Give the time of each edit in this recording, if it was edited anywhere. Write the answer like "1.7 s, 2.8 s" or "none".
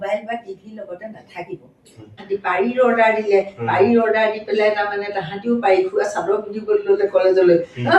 2.2 s